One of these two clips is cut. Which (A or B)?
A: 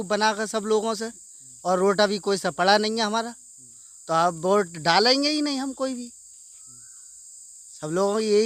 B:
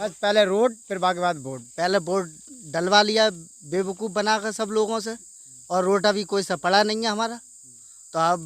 B